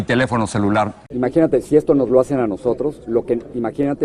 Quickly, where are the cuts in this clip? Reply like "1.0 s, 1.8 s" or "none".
1.0 s